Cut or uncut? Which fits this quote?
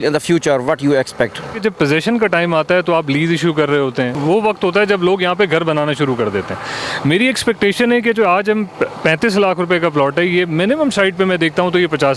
cut